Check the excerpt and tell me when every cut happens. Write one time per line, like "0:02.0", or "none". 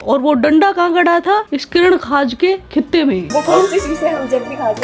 0:03.3